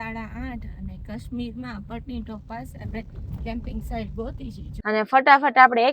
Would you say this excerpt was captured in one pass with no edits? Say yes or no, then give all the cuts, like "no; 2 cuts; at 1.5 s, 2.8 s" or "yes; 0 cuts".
no; 1 cut; at 4.7 s